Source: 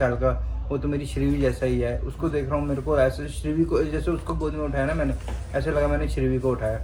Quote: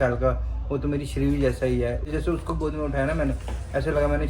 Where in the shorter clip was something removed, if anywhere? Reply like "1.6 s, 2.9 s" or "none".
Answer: 2.1 s